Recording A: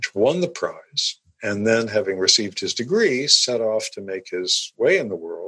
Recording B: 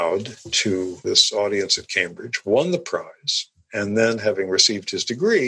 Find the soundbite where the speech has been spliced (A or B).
B